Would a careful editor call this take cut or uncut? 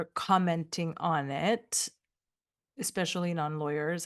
uncut